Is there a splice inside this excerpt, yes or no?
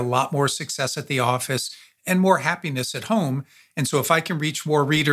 no